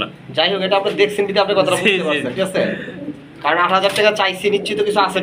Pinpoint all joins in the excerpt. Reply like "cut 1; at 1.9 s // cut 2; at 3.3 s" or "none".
none